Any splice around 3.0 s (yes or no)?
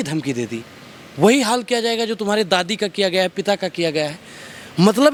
no